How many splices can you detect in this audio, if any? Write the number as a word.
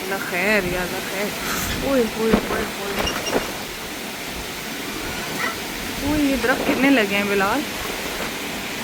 zero